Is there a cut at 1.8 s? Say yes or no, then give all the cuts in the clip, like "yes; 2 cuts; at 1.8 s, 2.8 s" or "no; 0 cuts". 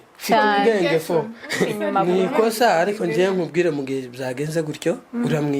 yes; 1 cut; at 1.8 s